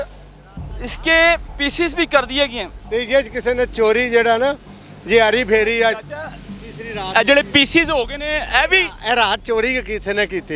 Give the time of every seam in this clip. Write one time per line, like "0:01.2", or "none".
0:02.7